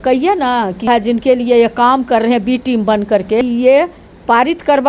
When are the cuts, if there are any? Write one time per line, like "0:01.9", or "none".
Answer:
0:00.9
0:03.4